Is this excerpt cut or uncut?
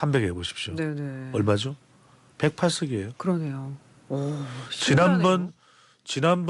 uncut